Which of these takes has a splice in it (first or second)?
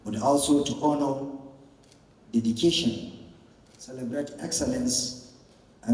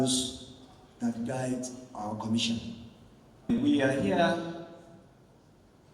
second